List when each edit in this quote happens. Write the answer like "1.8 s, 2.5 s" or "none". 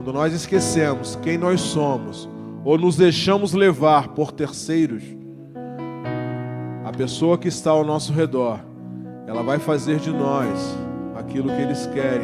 none